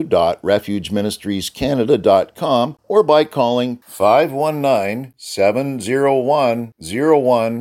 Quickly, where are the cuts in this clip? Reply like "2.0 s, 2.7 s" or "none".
2.8 s